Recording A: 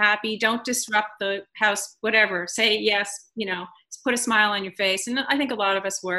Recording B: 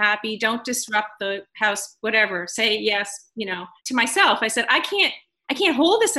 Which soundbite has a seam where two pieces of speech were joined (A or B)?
B